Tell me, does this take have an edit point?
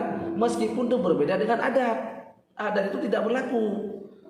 no; 0 cuts

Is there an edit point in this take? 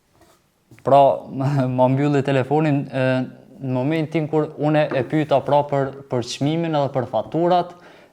no; 0 cuts

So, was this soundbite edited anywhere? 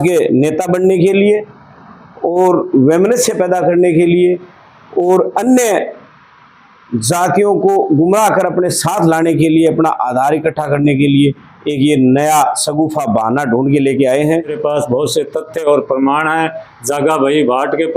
yes; 1 cut; at 14.6 s

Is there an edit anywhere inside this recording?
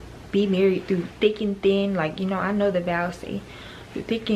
no; 0 cuts

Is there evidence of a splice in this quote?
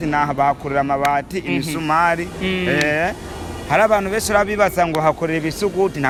no; 0 cuts

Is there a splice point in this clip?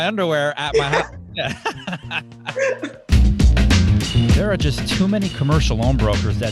yes; 1 cut; at 3.1 s

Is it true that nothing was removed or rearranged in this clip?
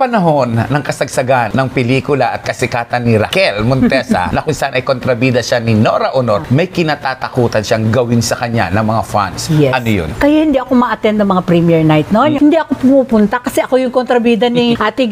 no; 2 cuts; at 10.1 s, 12.4 s

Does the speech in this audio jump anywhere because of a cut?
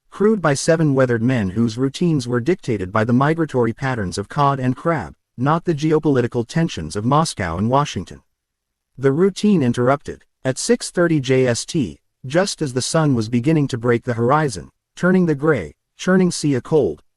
no; 0 cuts

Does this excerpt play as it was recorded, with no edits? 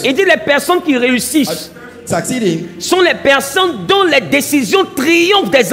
yes; 0 cuts

